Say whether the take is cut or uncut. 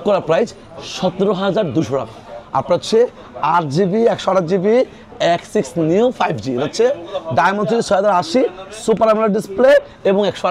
uncut